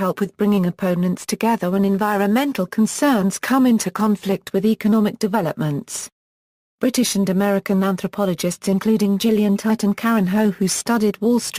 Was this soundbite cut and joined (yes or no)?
no